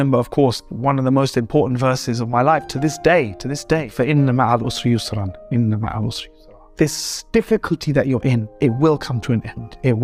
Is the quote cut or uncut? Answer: uncut